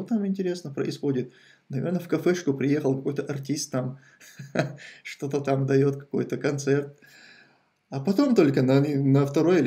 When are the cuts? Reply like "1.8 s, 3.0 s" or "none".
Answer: none